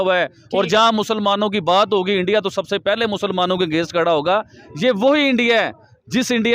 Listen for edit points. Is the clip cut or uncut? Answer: uncut